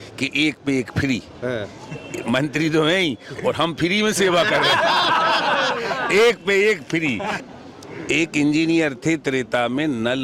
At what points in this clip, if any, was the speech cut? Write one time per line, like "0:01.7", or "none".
0:07.4